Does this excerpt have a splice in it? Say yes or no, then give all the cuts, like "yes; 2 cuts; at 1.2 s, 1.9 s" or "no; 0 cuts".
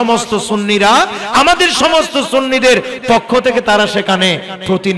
no; 0 cuts